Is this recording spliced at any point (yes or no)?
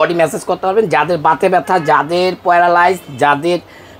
no